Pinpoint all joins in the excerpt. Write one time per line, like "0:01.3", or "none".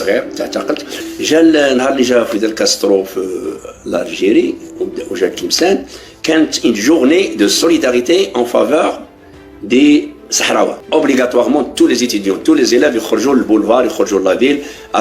0:01.0
0:10.8